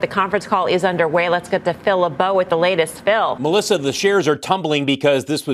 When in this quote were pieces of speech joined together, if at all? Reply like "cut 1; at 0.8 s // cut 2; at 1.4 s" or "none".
none